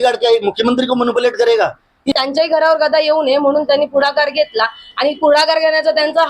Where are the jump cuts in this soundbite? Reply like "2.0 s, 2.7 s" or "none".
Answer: 2.2 s